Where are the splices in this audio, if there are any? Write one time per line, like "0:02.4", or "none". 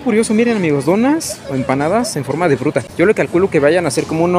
0:02.9